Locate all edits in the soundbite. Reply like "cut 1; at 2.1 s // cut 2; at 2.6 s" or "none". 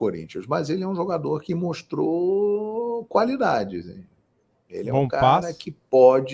none